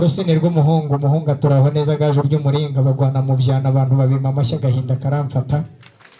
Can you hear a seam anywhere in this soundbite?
no; 0 cuts

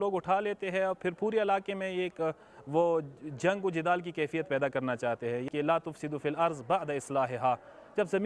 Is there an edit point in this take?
yes; 1 cut; at 5.5 s

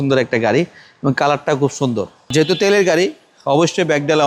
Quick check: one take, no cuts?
yes; 0 cuts

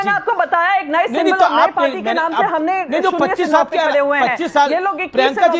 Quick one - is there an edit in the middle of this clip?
no; 0 cuts

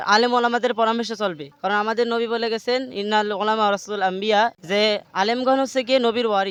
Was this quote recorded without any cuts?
yes; 0 cuts

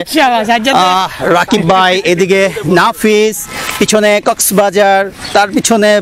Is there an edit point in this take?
no; 0 cuts

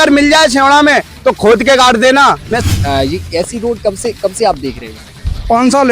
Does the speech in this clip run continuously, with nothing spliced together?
no; 1 cut; at 2.6 s

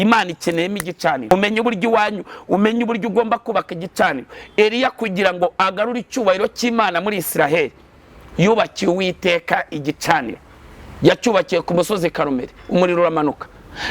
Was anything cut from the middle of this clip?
yes; 1 cut; at 1.3 s

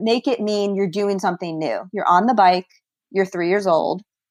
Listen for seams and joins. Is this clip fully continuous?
yes; 0 cuts

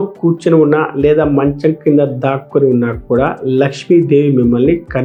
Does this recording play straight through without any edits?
yes; 0 cuts

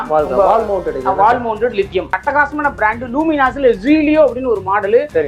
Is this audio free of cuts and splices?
no; 1 cut; at 2.1 s

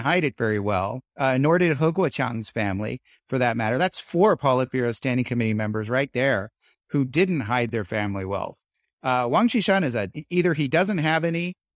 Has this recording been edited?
yes; 1 cut; at 10.1 s

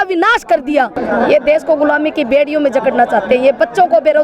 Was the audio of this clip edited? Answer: yes; 1 cut; at 1.0 s

